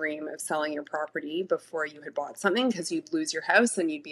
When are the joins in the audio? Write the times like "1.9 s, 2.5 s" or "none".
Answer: none